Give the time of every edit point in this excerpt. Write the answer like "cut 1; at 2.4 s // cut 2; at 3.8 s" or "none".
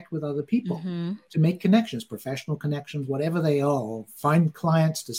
none